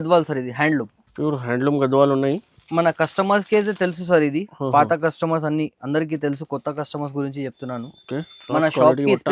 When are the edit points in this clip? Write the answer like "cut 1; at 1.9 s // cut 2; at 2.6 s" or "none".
none